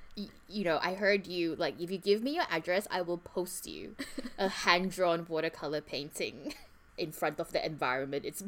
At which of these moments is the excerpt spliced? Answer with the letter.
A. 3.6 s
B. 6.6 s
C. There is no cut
B